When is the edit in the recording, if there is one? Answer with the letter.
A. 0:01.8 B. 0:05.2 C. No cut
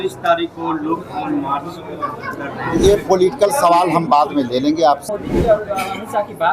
B